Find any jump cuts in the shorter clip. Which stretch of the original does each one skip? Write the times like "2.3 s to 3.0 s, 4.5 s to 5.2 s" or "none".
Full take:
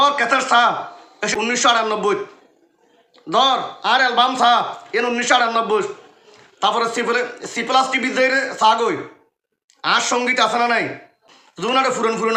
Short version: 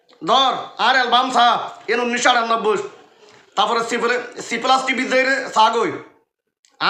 none